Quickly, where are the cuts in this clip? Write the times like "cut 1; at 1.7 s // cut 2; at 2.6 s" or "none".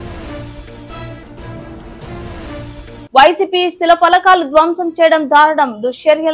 none